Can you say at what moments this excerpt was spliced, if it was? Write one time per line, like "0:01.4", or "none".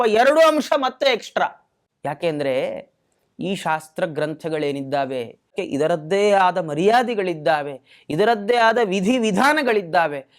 0:05.6